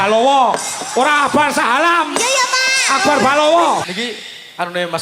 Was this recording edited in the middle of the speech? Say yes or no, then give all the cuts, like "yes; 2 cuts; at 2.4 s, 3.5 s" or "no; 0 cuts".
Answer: yes; 1 cut; at 3.8 s